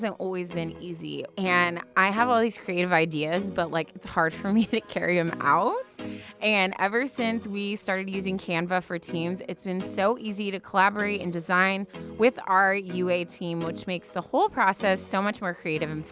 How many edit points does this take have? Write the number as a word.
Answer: one